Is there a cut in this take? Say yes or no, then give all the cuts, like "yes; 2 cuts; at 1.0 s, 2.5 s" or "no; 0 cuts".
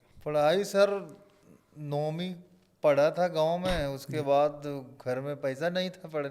no; 0 cuts